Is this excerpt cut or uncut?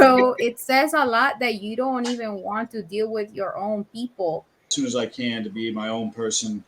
cut